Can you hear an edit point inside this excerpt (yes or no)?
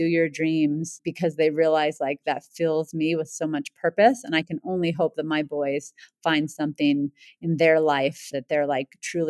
yes